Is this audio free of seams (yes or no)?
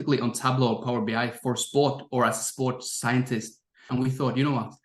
no